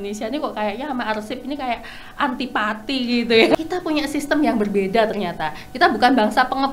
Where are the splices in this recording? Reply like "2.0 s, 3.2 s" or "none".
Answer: 3.5 s